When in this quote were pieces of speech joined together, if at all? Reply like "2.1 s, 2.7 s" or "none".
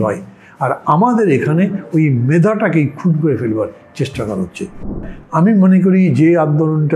4.8 s